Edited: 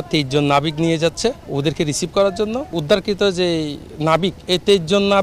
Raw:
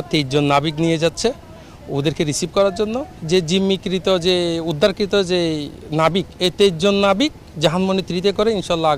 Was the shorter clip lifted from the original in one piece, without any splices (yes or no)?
no